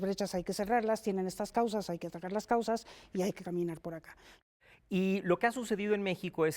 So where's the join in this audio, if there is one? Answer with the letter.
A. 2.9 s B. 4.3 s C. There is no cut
B